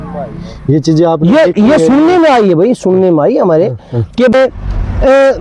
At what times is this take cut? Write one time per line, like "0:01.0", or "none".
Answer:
0:04.3